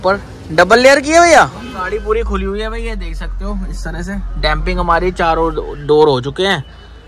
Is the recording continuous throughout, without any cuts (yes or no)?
no